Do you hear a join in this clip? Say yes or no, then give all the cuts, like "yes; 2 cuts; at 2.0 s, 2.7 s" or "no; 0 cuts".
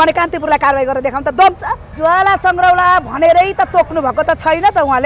yes; 1 cut; at 1.8 s